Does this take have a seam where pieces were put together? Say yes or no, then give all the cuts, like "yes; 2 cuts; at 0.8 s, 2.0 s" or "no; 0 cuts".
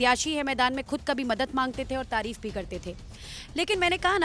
no; 0 cuts